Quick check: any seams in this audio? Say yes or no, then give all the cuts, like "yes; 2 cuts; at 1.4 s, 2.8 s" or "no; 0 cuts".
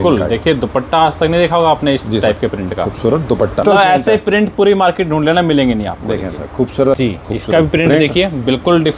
yes; 2 cuts; at 3.6 s, 7.0 s